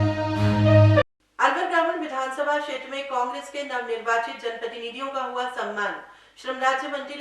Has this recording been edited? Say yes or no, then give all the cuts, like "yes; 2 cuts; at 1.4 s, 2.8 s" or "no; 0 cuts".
yes; 1 cut; at 1.1 s